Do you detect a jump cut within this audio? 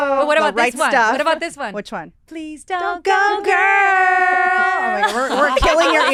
no; 0 cuts

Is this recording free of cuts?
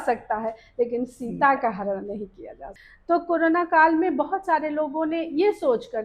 no; 1 cut; at 2.7 s

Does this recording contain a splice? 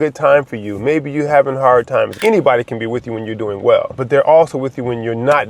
yes; 2 cuts; at 2.2 s, 4.0 s

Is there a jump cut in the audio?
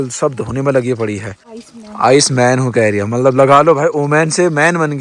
yes; 1 cut; at 1.2 s

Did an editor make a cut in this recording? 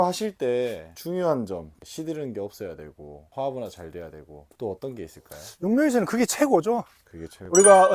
yes; 1 cut; at 1.8 s

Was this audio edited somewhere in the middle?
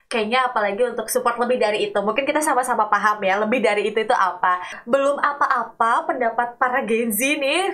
yes; 1 cut; at 4.8 s

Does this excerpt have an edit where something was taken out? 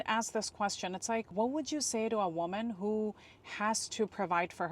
yes; 1 cut; at 1.3 s

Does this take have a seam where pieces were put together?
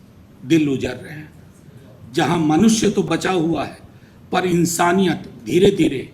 yes; 1 cut; at 3.1 s

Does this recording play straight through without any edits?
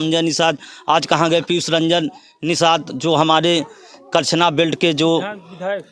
yes; 0 cuts

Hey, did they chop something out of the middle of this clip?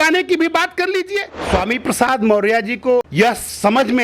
yes; 2 cuts; at 1.3 s, 3.1 s

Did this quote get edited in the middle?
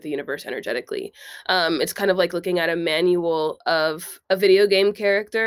yes; 1 cut; at 4.1 s

